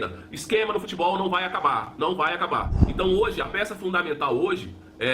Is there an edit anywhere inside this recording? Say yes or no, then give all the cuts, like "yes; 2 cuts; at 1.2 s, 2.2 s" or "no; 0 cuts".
yes; 1 cut; at 2.8 s